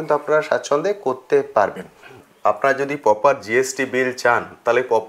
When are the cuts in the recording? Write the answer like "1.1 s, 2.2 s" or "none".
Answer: 2.2 s